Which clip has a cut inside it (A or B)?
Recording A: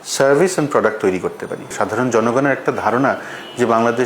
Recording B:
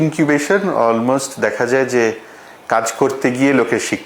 A